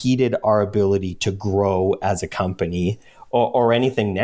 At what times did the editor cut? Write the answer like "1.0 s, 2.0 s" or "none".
none